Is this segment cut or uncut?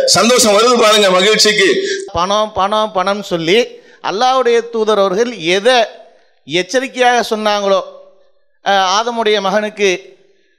cut